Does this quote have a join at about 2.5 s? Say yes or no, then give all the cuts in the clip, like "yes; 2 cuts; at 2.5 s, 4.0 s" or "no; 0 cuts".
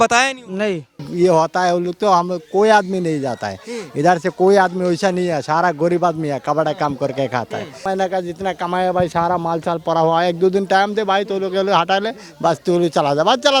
no; 2 cuts; at 1.1 s, 7.8 s